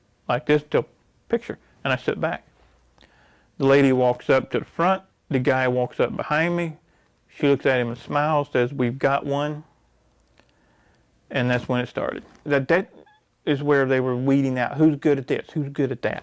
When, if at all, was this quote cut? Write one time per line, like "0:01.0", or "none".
0:12.5